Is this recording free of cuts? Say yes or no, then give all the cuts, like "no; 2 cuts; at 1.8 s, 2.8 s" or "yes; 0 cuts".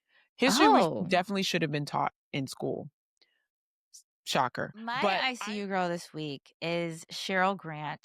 no; 1 cut; at 5.2 s